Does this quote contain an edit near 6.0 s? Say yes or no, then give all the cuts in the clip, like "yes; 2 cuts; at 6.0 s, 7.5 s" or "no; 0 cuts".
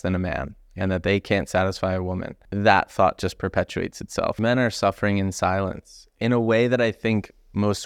no; 2 cuts; at 2.4 s, 4.4 s